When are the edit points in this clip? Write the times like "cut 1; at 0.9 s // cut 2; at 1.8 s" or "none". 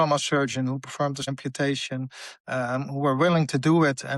cut 1; at 1.3 s